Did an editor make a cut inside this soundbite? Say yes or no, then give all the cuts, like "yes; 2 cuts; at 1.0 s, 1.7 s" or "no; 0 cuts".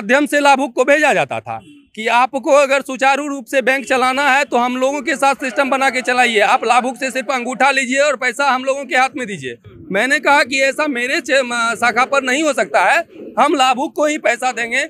no; 0 cuts